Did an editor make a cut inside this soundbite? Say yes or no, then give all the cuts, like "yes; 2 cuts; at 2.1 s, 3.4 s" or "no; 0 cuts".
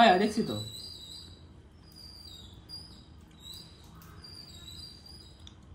no; 0 cuts